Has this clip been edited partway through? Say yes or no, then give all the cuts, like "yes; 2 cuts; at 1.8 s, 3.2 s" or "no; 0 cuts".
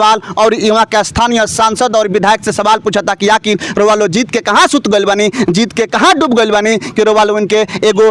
no; 0 cuts